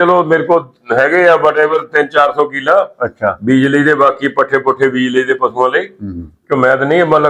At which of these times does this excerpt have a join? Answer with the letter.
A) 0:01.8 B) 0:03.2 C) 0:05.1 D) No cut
D